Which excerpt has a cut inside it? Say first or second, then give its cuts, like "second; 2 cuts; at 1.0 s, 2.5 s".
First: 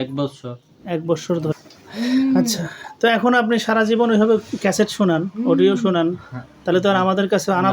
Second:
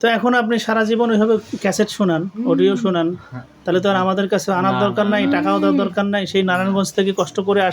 first; 1 cut; at 1.5 s